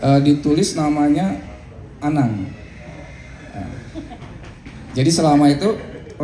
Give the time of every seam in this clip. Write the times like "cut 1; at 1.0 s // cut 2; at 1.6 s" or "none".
none